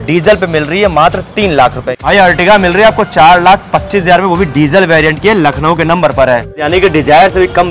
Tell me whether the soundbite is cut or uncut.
cut